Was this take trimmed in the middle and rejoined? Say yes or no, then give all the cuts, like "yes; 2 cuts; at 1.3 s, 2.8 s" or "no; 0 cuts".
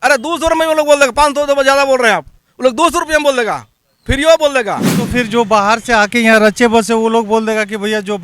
yes; 1 cut; at 5.1 s